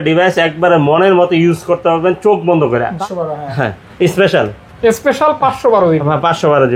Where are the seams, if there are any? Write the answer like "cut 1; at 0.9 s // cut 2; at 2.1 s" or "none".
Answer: cut 1; at 2.9 s